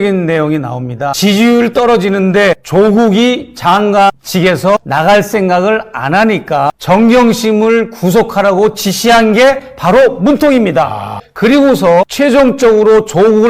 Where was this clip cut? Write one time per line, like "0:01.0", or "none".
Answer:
0:01.1
0:06.8